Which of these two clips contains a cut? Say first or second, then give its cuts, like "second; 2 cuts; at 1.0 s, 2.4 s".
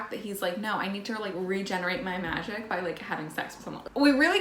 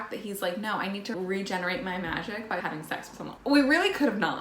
second; 2 cuts; at 1.2 s, 2.8 s